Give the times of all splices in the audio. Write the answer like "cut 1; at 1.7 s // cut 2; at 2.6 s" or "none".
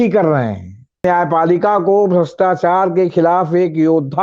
cut 1; at 1.0 s